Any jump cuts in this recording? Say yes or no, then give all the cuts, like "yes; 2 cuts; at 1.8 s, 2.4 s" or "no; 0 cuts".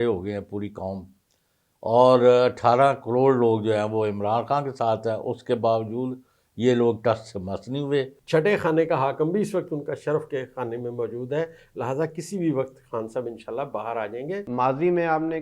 yes; 2 cuts; at 8.2 s, 14.4 s